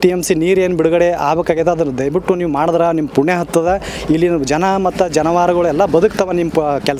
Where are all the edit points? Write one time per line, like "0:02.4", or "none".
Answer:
none